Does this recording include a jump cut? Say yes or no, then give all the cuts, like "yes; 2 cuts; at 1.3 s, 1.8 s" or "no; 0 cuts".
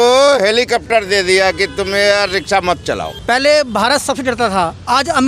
yes; 1 cut; at 3.1 s